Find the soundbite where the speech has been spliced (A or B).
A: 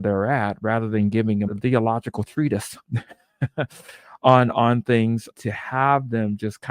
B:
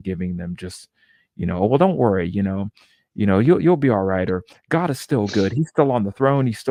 A